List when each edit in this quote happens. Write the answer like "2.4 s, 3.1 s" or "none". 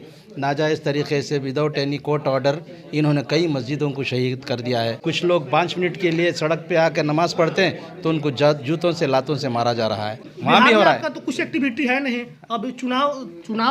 5.0 s, 10.3 s